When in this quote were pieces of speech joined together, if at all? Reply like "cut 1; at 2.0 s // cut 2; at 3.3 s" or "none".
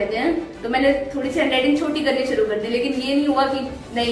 none